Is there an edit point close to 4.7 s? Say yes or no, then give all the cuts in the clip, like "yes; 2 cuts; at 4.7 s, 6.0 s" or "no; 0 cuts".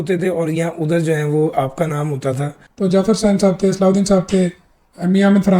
no; 1 cut; at 2.6 s